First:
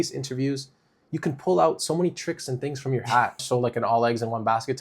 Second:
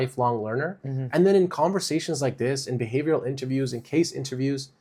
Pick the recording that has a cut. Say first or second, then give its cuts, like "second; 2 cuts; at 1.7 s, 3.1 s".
first; 1 cut; at 3.4 s